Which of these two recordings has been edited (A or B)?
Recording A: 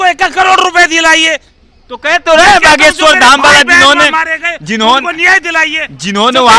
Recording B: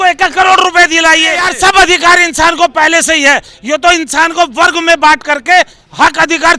B